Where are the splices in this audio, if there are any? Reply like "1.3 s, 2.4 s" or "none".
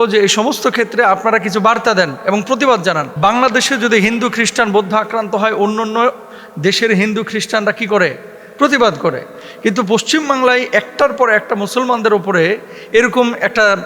3.1 s